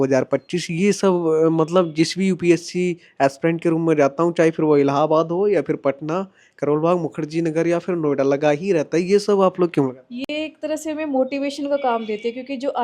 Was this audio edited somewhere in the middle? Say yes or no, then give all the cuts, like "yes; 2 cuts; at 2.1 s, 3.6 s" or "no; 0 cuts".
no; 0 cuts